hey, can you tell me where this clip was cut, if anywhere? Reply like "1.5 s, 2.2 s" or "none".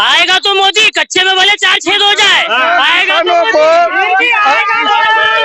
none